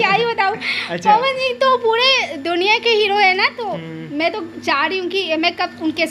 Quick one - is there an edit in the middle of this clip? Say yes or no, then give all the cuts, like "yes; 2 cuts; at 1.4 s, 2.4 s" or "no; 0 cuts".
no; 0 cuts